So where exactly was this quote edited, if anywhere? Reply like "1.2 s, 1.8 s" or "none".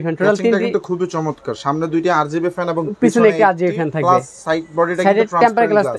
none